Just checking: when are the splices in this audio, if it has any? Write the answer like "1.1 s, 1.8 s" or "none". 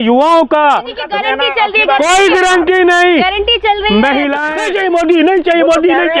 1.0 s, 4.6 s